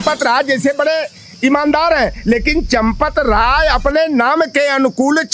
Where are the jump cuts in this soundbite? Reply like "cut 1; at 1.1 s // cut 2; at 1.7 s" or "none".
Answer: none